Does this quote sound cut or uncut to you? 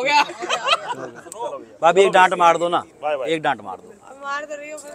uncut